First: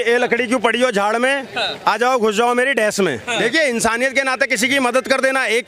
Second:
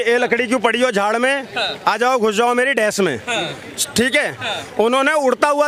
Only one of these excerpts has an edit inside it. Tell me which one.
first; 1 cut; at 3.4 s

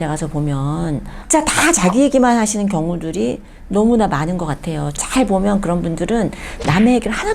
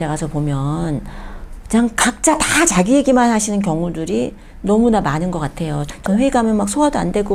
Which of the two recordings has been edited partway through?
first; 2 cuts; at 1.2 s, 5.0 s

